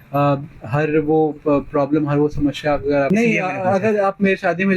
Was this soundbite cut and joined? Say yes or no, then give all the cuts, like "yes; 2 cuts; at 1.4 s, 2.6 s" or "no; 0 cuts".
yes; 1 cut; at 3.1 s